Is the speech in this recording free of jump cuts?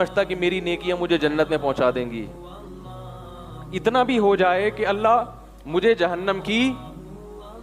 yes; 0 cuts

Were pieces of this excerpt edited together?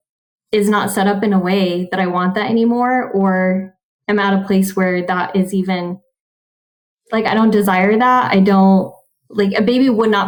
no; 0 cuts

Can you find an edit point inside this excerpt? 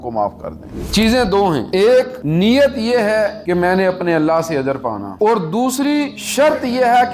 no; 0 cuts

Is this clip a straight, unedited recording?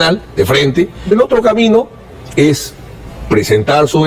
no; 1 cut; at 1.1 s

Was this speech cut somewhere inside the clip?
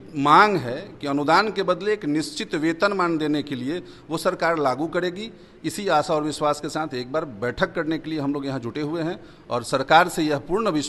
no; 0 cuts

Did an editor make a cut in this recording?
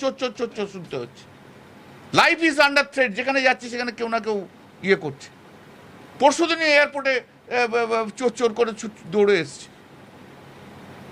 no; 0 cuts

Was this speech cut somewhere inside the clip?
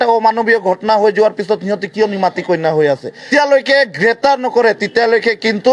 yes; 1 cut; at 3.3 s

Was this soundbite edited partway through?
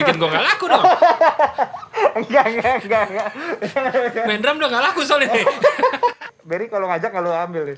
yes; 1 cut; at 6.2 s

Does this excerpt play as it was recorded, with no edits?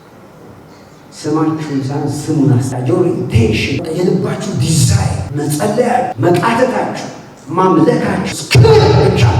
no; 5 cuts; at 2.7 s, 3.8 s, 5.2 s, 6.1 s, 8.4 s

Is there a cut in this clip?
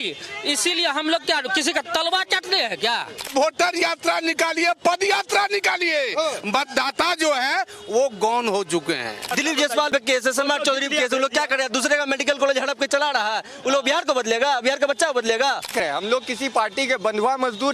yes; 3 cuts; at 3.3 s, 9.4 s, 15.7 s

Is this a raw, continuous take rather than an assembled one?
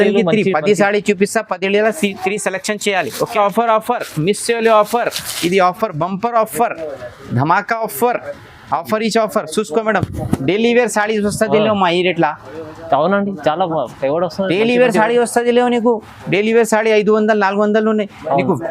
no; 1 cut; at 3.2 s

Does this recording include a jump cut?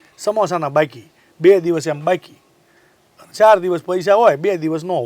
no; 0 cuts

